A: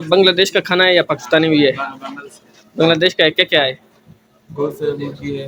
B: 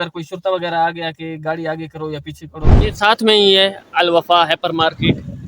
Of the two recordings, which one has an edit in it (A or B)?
B